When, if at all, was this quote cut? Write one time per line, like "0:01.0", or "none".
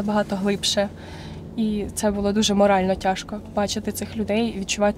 none